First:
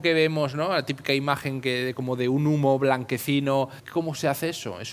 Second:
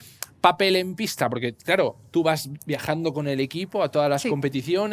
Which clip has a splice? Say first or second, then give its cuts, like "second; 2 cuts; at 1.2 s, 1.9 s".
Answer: first; 1 cut; at 3.8 s